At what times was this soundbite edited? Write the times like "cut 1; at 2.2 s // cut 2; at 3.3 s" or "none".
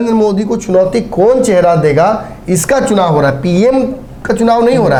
none